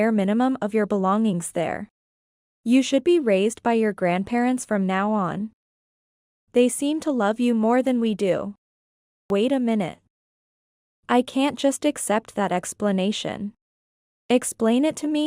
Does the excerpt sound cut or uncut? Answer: cut